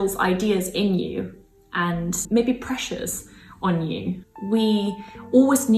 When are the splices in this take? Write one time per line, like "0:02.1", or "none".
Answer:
none

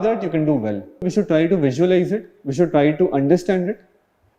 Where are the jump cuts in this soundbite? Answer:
0:01.1

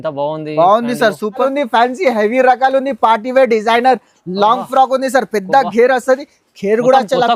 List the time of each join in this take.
0:01.4

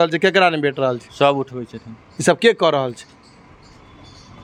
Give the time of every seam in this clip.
none

